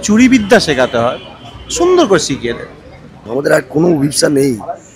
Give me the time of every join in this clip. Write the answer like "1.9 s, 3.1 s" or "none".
3.1 s